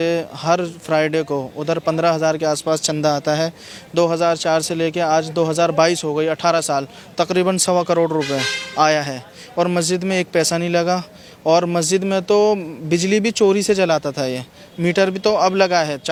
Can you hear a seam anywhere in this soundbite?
no; 0 cuts

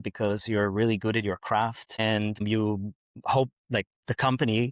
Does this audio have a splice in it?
no; 0 cuts

